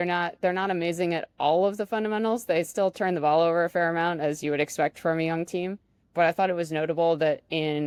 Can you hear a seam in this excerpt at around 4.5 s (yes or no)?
no